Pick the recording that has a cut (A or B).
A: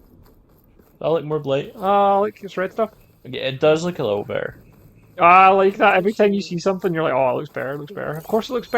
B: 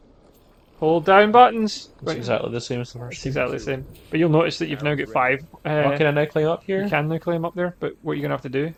A